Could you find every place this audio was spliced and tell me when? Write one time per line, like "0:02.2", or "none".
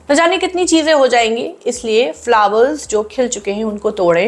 none

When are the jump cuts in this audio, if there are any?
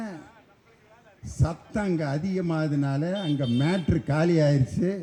none

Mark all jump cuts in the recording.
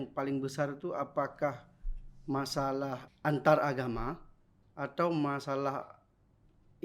0:03.1

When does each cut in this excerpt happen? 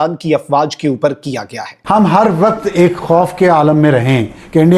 0:01.7

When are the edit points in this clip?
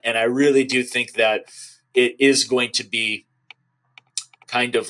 none

